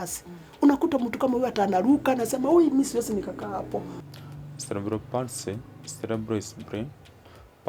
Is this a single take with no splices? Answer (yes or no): no